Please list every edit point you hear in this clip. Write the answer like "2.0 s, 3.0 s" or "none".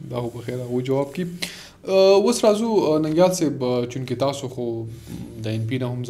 none